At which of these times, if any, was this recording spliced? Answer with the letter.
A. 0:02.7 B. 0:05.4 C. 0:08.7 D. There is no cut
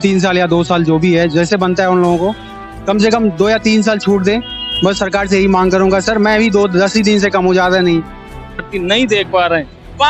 C